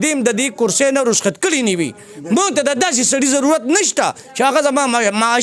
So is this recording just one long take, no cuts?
yes; 0 cuts

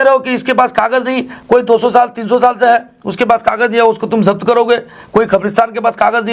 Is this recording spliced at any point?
no; 0 cuts

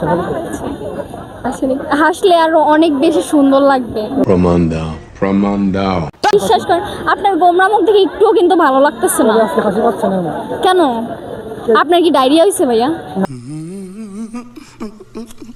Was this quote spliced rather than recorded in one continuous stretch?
no; 0 cuts

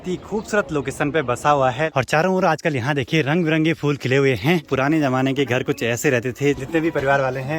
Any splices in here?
yes; 3 cuts; at 1.9 s, 4.7 s, 6.6 s

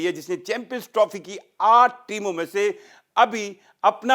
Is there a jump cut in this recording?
no; 0 cuts

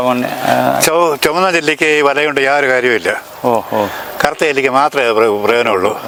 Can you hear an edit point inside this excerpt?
no; 0 cuts

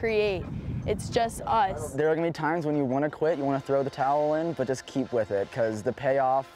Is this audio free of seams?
no; 1 cut; at 1.8 s

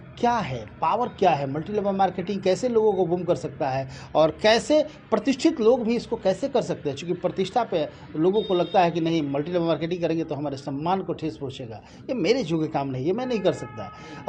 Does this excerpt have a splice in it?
no; 0 cuts

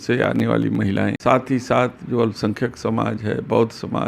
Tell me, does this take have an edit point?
yes; 1 cut; at 1.2 s

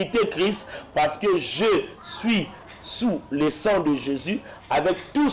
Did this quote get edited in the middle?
no; 0 cuts

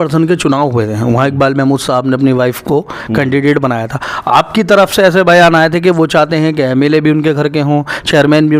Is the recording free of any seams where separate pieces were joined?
yes; 0 cuts

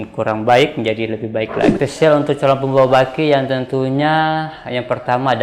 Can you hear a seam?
yes; 1 cut; at 1.7 s

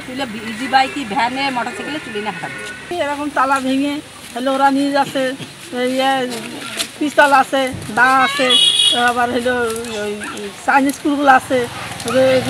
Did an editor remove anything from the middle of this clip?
no; 0 cuts

